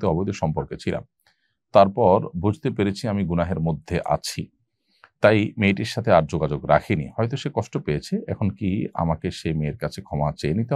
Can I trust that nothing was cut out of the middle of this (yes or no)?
yes